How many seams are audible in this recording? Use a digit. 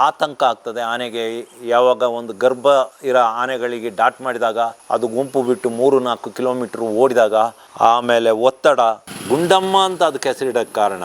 3